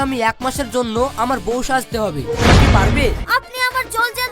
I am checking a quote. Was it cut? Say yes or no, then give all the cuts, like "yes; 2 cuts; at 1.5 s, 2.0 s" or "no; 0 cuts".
yes; 1 cut; at 3.2 s